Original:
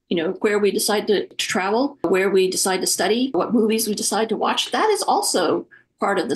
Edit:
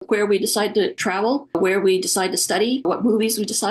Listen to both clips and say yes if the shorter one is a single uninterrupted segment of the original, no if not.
no